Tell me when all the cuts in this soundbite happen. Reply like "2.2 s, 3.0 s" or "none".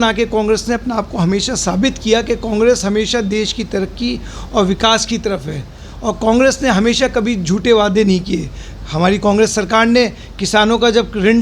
none